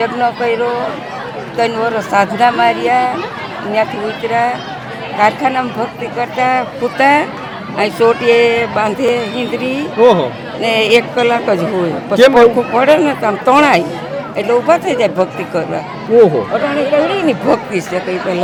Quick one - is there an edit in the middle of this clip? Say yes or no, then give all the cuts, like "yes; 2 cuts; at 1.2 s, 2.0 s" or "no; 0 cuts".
no; 0 cuts